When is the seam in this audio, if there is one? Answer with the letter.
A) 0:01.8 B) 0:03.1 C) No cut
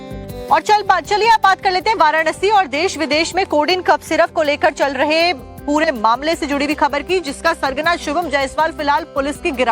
A